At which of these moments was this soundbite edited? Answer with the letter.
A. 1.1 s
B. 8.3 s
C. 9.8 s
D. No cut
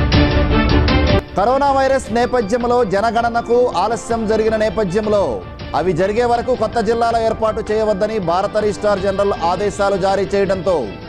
A